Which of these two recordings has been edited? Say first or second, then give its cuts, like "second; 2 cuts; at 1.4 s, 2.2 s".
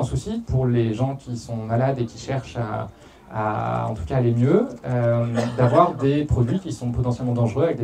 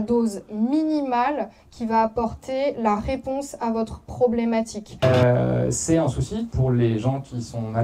second; 1 cut; at 5.0 s